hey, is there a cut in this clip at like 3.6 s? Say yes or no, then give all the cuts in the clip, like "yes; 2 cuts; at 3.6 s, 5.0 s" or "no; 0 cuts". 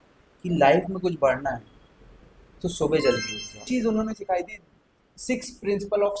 yes; 1 cut; at 3.6 s